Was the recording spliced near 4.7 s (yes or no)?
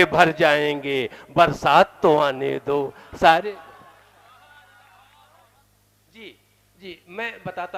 no